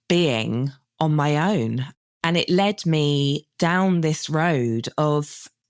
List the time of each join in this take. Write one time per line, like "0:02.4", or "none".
0:02.0